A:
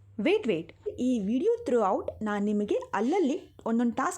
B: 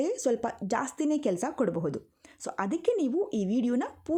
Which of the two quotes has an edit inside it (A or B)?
A